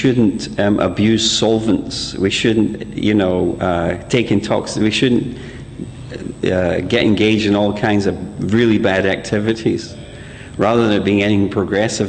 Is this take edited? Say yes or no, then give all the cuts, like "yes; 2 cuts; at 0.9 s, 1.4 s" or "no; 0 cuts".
yes; 1 cut; at 2.0 s